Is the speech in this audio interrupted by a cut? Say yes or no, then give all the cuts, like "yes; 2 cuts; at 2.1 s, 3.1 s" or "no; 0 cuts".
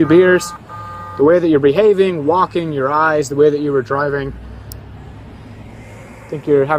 no; 0 cuts